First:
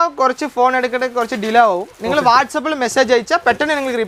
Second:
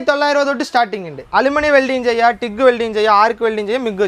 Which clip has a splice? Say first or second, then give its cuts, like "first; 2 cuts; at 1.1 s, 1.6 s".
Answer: second; 1 cut; at 1.2 s